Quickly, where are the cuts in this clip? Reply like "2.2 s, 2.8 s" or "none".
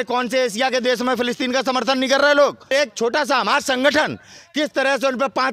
2.7 s